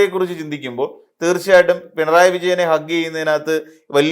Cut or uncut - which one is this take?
uncut